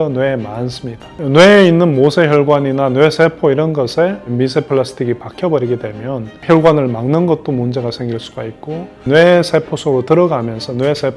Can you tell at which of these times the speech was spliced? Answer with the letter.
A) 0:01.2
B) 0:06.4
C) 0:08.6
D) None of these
A